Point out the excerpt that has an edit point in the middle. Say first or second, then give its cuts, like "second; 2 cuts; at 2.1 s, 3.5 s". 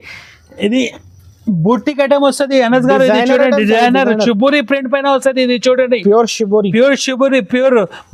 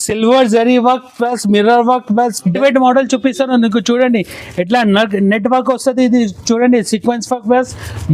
second; 1 cut; at 2.5 s